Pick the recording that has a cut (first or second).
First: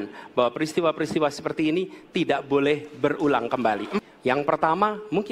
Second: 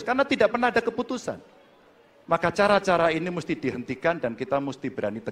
first